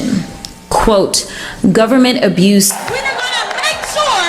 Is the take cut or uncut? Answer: cut